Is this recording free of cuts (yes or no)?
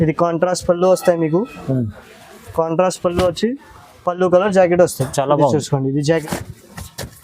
no